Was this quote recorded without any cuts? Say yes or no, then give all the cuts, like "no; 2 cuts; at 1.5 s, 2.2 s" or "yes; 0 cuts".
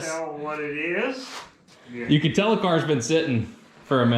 no; 1 cut; at 1.9 s